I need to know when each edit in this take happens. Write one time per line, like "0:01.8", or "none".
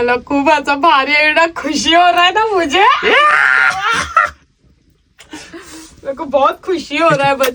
none